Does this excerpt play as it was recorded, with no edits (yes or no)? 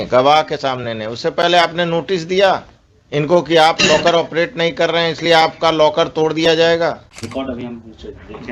no